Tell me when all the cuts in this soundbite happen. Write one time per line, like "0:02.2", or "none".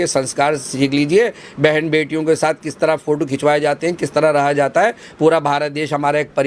none